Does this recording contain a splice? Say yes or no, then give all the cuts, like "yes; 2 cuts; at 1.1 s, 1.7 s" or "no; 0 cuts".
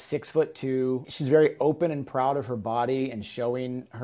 yes; 1 cut; at 1.1 s